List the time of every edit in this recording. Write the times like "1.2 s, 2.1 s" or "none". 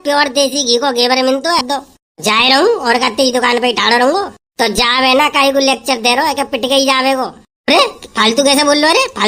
1.7 s